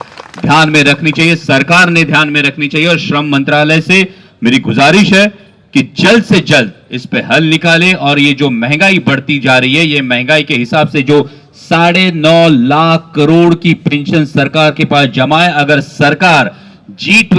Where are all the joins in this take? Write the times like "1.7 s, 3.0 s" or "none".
none